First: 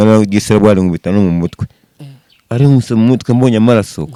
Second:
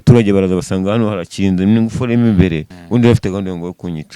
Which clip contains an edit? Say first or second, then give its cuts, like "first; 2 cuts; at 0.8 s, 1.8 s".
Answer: second; 1 cut; at 2.7 s